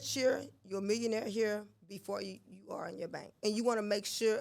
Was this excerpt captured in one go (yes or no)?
no